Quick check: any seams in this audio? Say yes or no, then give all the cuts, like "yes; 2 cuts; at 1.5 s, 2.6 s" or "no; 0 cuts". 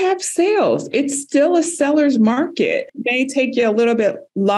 yes; 1 cut; at 3.0 s